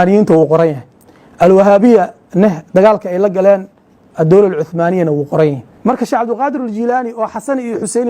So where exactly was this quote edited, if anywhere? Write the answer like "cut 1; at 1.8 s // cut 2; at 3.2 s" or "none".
cut 1; at 5.7 s